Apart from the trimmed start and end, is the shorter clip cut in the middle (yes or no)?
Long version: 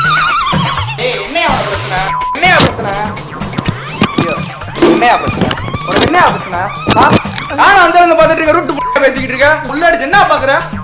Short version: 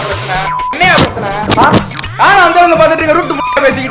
yes